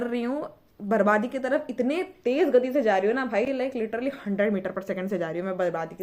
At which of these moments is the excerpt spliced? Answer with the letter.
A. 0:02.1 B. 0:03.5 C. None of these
C